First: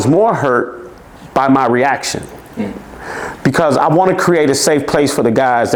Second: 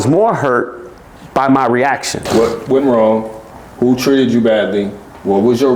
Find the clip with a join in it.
second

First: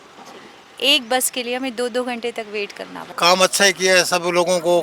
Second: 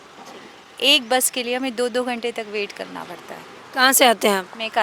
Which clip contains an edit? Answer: first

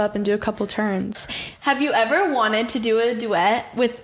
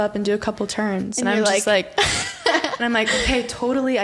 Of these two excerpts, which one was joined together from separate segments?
first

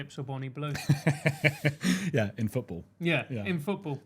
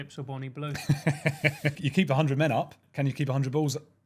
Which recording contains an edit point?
second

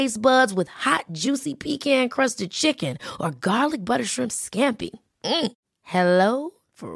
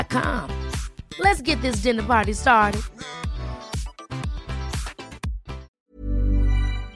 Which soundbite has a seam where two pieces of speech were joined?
second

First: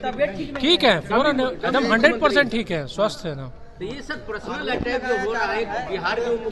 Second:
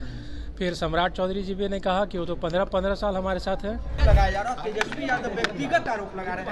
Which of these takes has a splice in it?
second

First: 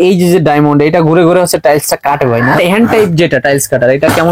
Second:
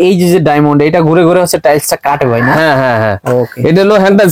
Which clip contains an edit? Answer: first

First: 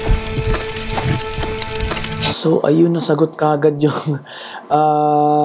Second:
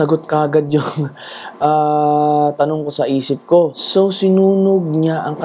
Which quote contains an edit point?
second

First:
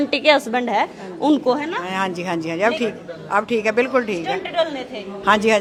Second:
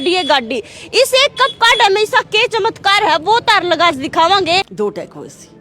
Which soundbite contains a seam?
second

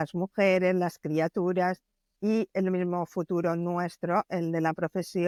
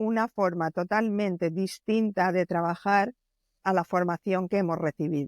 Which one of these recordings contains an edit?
second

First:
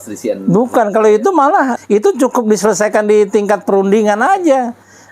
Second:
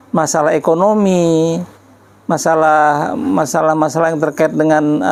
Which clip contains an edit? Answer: first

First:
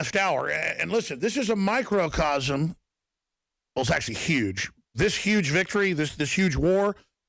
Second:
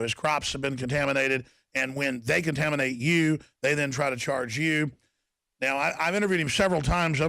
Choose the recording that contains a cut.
second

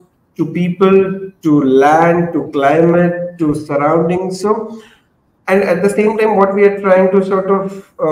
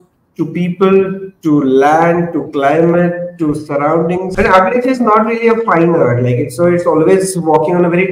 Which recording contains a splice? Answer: second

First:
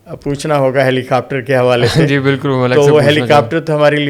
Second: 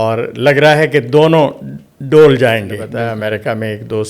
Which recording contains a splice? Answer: second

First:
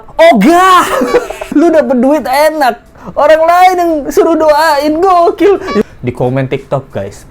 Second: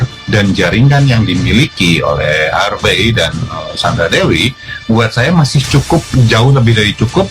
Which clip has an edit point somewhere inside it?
first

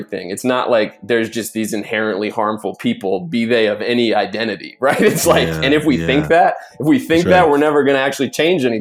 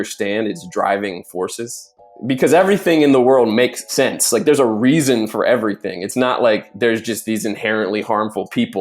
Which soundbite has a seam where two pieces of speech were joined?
second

